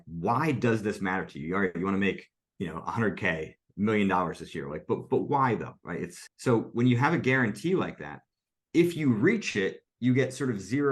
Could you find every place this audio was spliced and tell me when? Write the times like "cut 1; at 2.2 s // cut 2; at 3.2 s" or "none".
cut 1; at 6.2 s